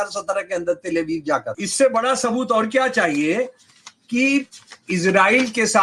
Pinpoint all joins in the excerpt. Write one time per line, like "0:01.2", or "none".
0:01.6